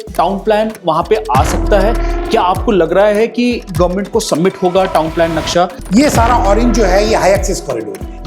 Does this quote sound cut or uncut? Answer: cut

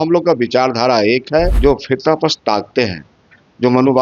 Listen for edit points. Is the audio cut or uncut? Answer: cut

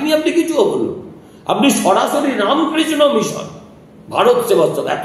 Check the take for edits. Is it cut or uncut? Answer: uncut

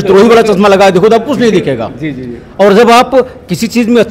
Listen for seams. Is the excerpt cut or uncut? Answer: uncut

